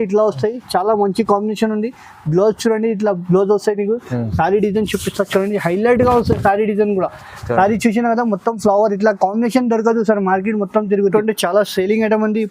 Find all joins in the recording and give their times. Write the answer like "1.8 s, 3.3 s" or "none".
11.1 s